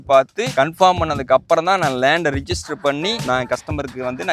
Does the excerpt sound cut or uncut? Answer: uncut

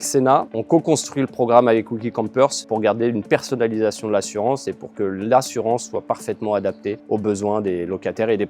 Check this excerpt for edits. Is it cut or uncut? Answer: cut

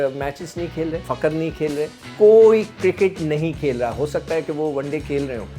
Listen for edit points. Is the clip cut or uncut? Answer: cut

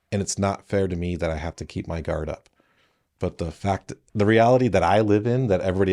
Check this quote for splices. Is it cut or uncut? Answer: uncut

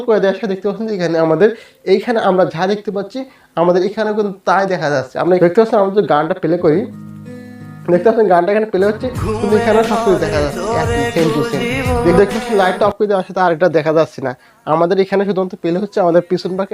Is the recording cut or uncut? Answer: cut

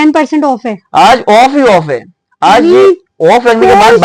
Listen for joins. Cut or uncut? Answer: uncut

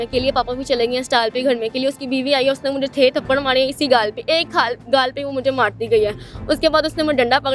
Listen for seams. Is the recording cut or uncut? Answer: uncut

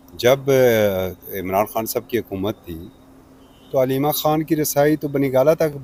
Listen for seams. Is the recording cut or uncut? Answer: uncut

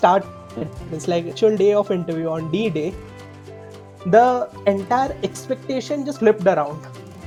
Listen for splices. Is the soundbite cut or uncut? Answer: uncut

